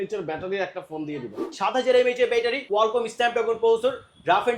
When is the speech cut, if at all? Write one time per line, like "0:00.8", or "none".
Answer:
0:01.4
0:02.6

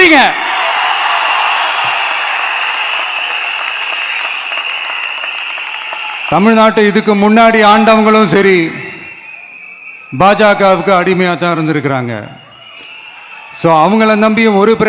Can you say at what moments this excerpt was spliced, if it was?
0:06.4

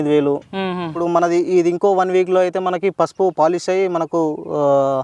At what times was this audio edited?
0:01.0

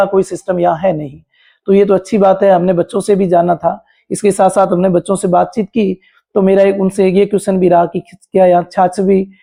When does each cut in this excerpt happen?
none

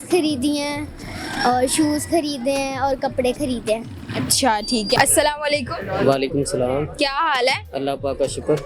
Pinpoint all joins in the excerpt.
none

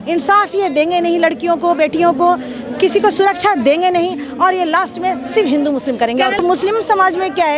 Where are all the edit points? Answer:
0:06.4

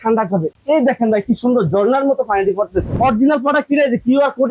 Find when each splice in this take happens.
0:02.9

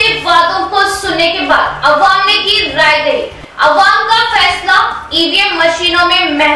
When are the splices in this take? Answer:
none

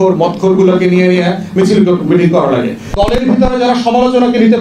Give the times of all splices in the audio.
0:02.8

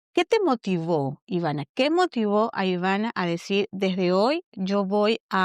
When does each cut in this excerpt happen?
none

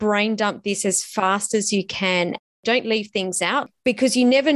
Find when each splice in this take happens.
0:02.5
0:03.6

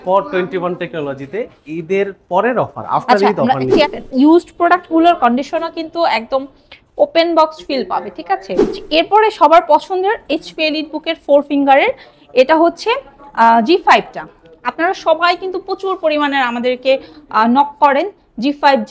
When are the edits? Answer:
0:03.9
0:08.8

